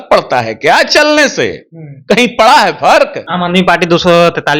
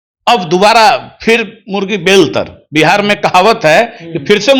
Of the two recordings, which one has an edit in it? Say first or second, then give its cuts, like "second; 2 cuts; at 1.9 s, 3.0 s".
first; 1 cut; at 3.2 s